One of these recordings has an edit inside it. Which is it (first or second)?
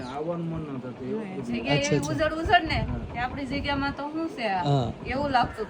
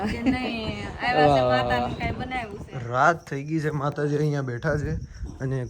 second